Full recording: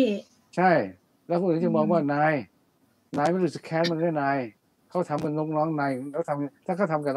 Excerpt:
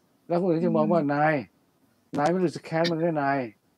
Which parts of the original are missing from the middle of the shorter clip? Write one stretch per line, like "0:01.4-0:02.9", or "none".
none